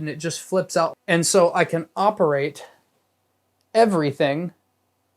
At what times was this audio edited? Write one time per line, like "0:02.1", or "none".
0:01.0